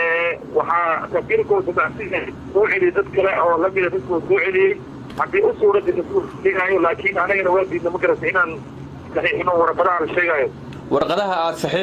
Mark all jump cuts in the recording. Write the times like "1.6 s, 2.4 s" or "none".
10.8 s

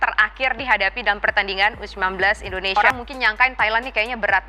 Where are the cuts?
2.8 s

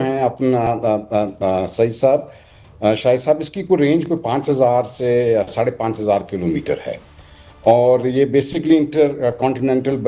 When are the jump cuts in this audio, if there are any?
none

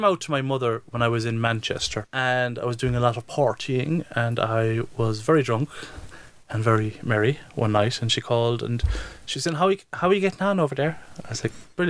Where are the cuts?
2.0 s

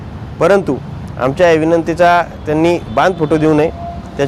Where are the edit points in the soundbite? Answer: none

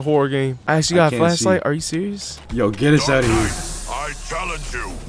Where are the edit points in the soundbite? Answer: 2.4 s

